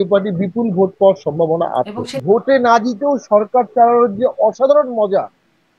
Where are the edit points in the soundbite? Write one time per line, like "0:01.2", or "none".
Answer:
0:02.1